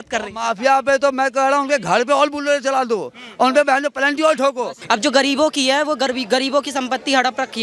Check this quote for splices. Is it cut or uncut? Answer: cut